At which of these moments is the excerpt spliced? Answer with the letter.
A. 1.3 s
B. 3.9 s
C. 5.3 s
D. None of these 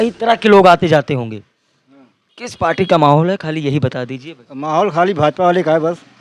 D